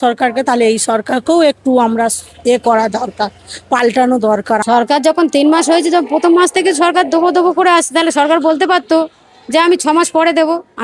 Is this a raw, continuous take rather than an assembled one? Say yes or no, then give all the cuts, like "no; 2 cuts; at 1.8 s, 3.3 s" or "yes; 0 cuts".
no; 1 cut; at 4.6 s